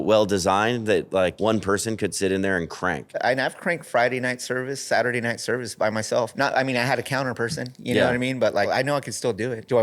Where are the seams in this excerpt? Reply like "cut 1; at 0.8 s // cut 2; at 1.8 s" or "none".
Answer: cut 1; at 1.4 s // cut 2; at 3.2 s // cut 3; at 6.3 s // cut 4; at 9.0 s